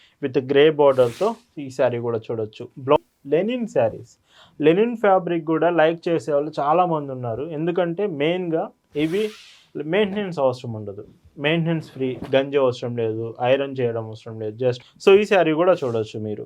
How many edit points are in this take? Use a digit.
2